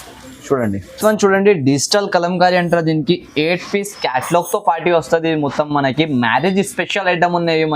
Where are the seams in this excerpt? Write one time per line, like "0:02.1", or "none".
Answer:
0:00.9